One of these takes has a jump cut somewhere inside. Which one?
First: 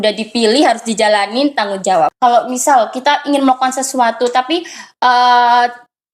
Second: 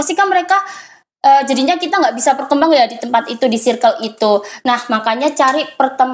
first; 1 cut; at 2.1 s

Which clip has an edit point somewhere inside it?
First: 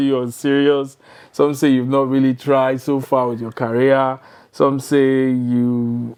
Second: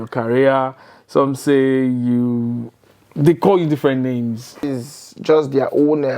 second; 1 cut; at 4.7 s

